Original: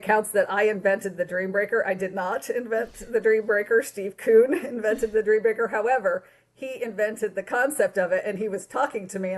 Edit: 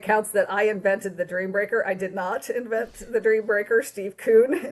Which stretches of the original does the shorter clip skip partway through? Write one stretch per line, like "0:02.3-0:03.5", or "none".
none